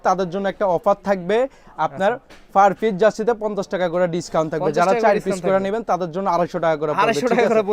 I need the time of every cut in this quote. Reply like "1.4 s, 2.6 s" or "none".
none